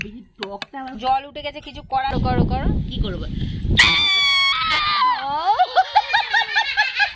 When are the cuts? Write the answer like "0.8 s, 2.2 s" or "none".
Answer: 2.1 s